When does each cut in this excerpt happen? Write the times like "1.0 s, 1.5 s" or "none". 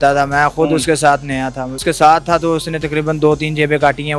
1.8 s